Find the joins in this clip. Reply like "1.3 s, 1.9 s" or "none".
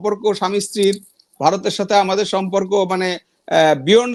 none

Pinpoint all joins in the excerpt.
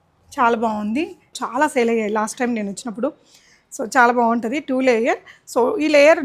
1.4 s

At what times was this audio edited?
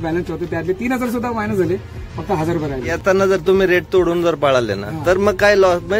2.9 s

